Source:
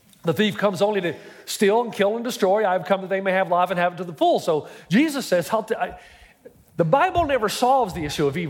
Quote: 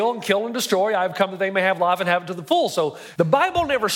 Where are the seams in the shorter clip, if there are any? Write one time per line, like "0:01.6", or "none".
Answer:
0:03.0